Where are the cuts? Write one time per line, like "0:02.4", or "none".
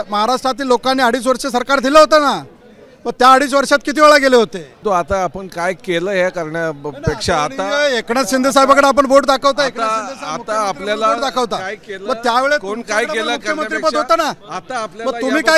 0:04.8